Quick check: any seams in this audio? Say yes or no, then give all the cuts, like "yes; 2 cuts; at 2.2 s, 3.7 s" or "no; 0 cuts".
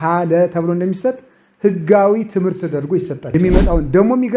yes; 1 cut; at 3.2 s